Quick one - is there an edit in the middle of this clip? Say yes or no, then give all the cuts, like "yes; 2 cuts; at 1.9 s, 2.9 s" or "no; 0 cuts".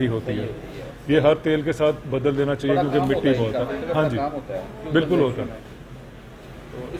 no; 0 cuts